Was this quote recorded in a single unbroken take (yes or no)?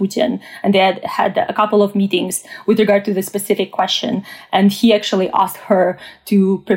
yes